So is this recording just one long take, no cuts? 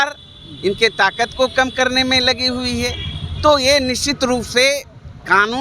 yes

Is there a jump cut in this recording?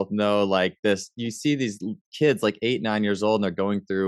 no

